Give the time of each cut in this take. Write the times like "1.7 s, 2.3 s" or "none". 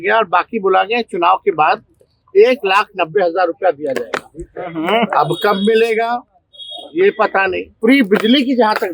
7.7 s

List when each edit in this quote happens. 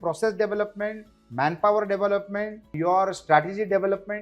2.7 s

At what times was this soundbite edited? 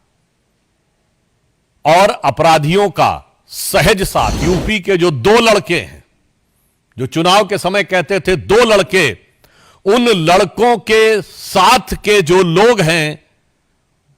4.4 s

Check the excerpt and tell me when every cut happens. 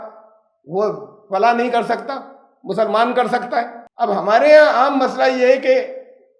3.8 s

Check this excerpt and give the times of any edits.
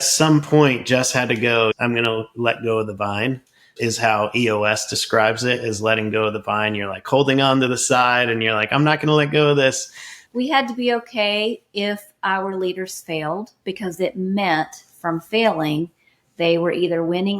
1.8 s

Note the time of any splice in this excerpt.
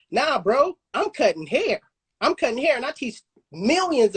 none

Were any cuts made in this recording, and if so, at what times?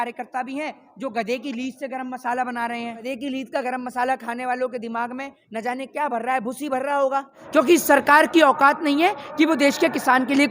3.0 s, 7.4 s

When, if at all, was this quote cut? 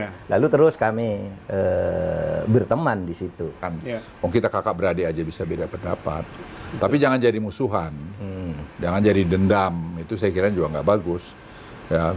3.7 s

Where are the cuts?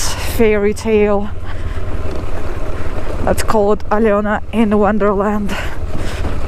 none

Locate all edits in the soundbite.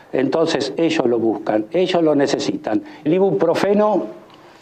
1.7 s

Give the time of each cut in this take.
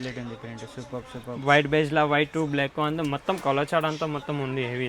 none

